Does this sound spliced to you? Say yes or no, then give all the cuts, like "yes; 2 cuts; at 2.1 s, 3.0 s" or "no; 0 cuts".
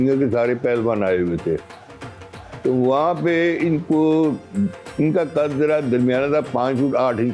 no; 0 cuts